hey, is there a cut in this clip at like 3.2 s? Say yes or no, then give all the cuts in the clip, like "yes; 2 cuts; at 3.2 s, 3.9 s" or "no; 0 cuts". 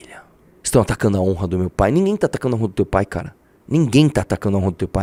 no; 0 cuts